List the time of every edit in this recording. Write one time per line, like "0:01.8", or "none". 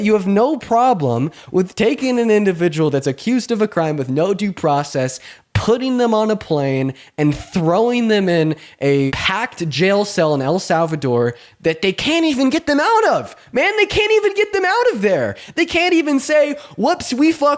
0:09.1